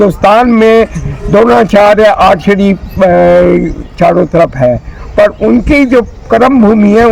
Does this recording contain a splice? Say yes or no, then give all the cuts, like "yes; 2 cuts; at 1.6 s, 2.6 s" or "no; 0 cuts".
no; 0 cuts